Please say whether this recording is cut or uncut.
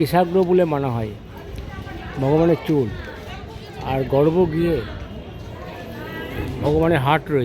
uncut